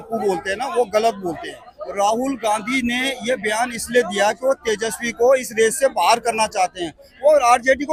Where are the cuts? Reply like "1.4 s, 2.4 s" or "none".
none